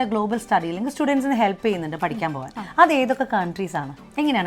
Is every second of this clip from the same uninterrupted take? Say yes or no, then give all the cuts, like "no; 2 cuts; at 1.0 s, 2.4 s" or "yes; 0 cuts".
yes; 0 cuts